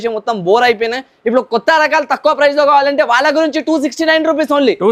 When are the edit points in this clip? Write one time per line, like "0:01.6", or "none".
none